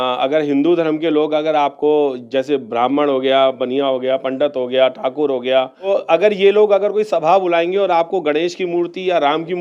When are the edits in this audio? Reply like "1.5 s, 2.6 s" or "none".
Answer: 5.9 s

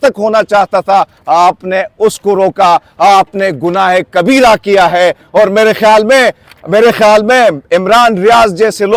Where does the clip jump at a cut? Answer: none

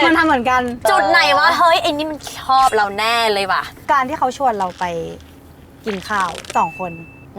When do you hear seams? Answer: 0.9 s, 3.7 s, 6.4 s

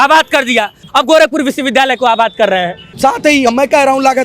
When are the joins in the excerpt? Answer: 2.8 s

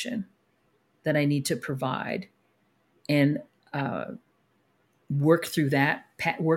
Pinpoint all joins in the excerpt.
none

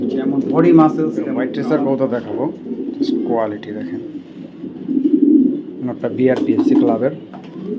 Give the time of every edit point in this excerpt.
1.5 s

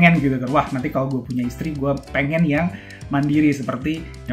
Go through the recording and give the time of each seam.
none

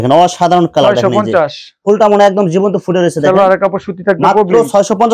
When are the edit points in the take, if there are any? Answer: none

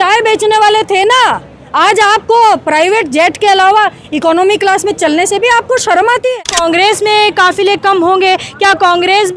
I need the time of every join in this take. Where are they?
6.3 s

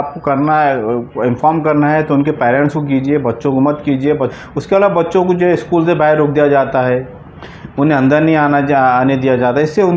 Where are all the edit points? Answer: 4.3 s

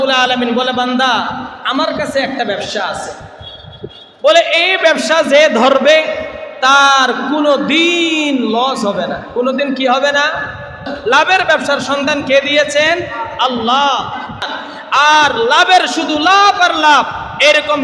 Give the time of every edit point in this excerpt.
10.9 s, 14.4 s

